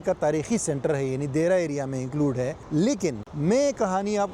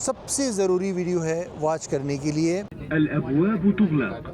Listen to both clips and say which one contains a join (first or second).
second